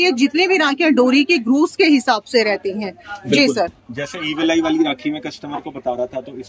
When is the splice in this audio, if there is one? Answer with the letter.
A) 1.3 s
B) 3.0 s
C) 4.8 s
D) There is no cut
D